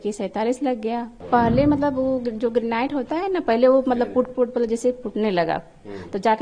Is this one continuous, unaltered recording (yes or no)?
no